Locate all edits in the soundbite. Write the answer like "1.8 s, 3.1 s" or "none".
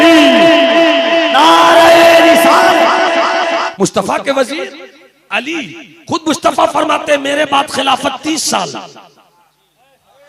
3.7 s